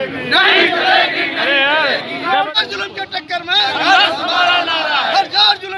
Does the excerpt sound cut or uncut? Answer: cut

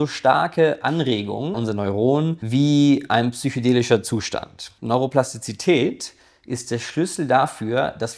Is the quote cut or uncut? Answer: cut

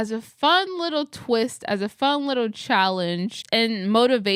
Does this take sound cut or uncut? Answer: uncut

